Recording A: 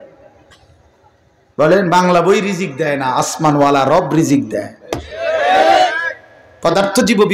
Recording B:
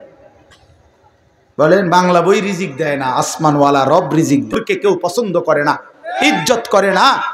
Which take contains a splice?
B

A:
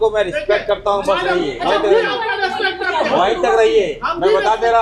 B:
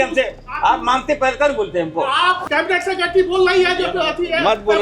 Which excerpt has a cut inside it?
B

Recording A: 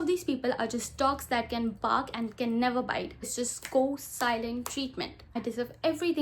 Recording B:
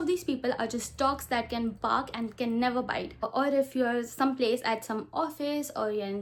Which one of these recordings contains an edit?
A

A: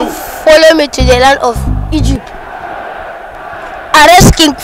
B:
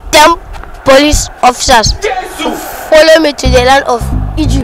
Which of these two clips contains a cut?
A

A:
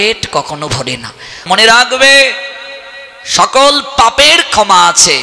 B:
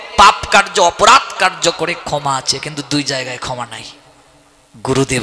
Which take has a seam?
A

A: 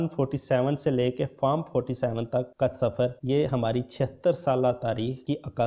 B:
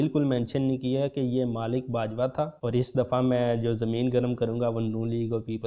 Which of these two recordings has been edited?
B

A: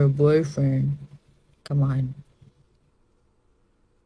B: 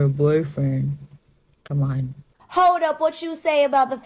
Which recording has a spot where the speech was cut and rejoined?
B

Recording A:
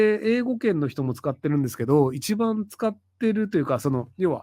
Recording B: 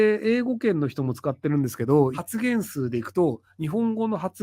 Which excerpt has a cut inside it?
B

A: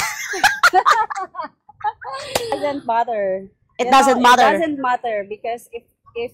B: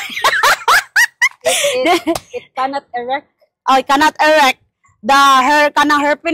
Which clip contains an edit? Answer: A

